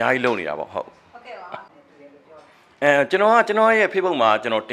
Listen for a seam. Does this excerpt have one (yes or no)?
yes